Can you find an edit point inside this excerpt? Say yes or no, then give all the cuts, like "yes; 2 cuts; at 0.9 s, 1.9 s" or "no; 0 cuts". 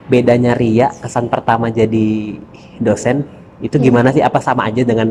no; 0 cuts